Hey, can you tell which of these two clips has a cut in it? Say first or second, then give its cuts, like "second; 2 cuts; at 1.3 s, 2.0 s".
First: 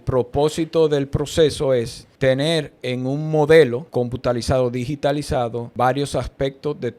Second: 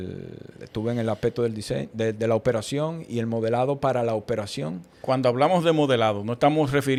first; 3 cuts; at 2.0 s, 3.8 s, 5.6 s